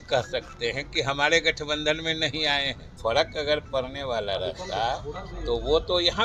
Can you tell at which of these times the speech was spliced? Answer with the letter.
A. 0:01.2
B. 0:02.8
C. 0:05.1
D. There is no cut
B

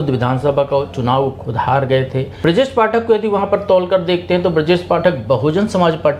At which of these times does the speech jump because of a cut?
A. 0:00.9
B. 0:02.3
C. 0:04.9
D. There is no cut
B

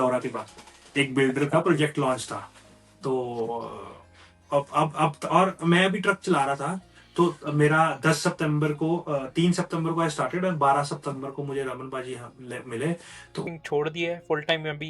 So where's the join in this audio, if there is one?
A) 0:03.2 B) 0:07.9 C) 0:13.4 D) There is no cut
C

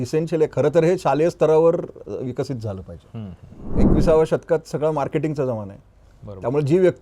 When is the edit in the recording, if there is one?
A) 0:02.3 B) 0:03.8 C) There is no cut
B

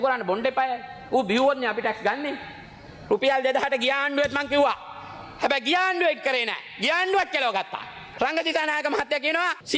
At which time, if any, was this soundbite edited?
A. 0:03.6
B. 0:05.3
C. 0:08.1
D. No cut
C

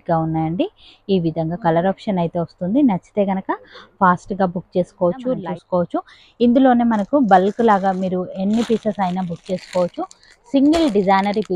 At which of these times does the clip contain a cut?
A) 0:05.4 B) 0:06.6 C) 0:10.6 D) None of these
A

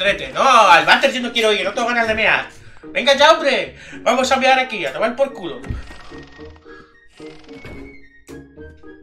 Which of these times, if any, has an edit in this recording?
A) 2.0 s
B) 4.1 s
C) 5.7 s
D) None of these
D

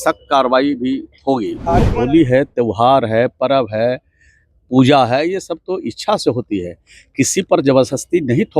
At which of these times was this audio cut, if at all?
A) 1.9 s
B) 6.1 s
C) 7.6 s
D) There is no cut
A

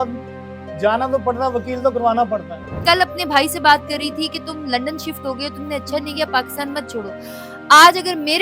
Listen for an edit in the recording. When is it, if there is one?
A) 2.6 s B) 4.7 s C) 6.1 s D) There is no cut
A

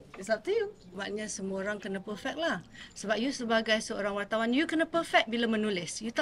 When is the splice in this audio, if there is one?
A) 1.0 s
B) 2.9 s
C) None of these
A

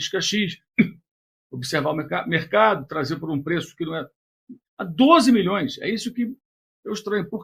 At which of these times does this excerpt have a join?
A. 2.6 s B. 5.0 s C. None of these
C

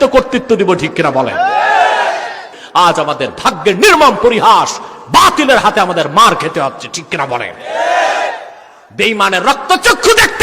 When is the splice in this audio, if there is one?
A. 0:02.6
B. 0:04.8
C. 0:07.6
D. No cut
A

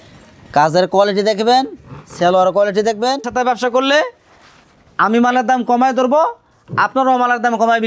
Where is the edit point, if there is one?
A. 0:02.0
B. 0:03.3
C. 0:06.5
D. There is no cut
B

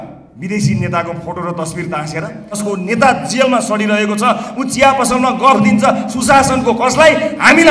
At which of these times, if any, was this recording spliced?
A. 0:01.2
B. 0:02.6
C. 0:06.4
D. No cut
B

